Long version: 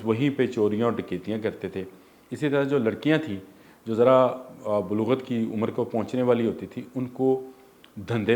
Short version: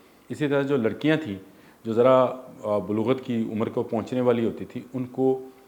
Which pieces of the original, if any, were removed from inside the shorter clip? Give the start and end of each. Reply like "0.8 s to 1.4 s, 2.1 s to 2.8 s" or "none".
none